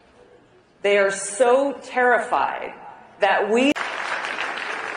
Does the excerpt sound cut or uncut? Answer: uncut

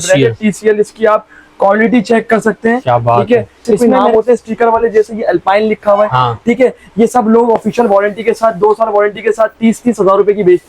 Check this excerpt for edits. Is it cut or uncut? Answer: cut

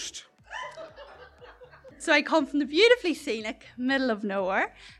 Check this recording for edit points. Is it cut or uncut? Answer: cut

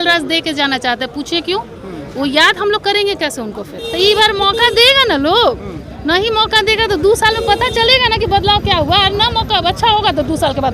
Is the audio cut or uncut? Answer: cut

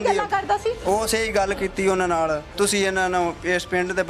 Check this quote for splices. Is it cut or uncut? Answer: cut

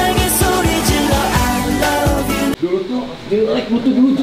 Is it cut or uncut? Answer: cut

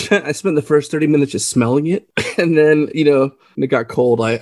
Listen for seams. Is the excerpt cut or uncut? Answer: cut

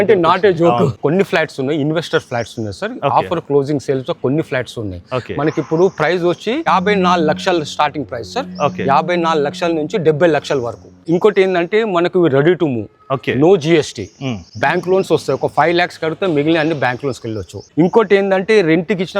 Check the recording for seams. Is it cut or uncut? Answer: cut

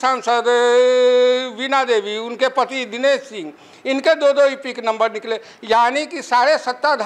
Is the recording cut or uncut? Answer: uncut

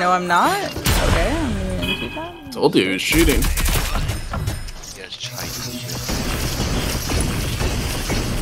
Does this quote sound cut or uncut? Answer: uncut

